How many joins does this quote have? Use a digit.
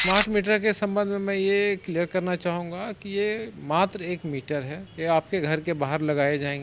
1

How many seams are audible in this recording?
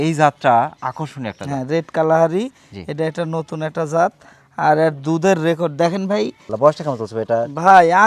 1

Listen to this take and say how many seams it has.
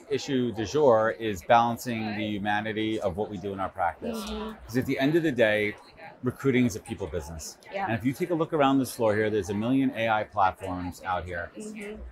0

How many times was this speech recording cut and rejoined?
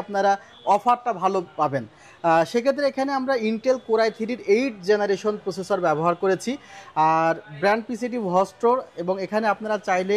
0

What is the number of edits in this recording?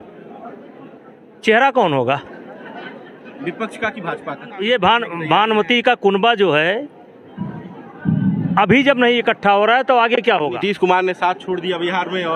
2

